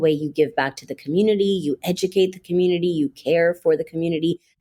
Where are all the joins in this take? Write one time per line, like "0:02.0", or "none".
none